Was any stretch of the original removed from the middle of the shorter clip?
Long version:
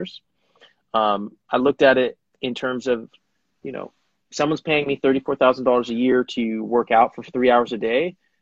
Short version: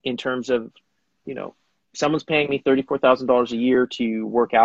no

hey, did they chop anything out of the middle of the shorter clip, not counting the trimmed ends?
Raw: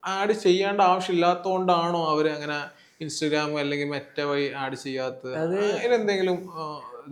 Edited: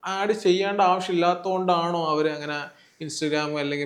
no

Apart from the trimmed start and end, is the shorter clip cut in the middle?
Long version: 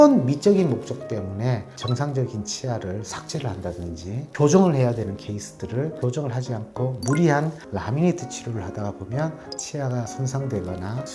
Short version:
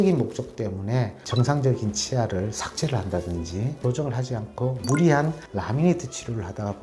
yes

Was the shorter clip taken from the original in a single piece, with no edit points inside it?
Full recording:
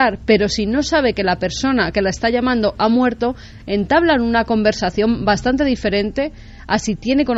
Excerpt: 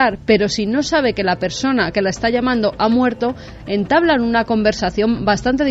yes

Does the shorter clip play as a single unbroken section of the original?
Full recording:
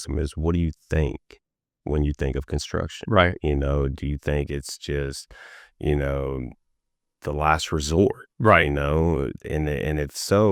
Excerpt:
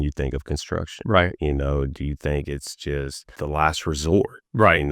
no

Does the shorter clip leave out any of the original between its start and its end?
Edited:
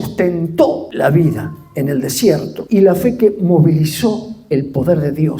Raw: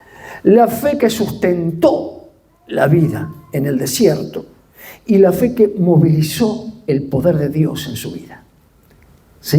yes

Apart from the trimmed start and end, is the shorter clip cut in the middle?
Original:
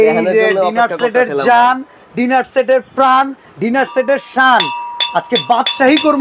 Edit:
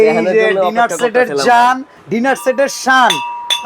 yes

